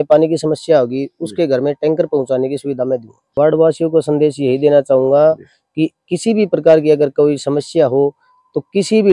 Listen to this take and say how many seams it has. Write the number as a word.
one